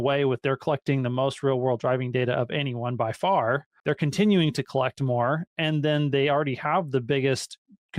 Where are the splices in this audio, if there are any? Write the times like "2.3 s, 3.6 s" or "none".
3.7 s